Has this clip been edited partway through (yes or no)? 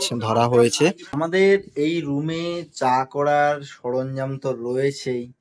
yes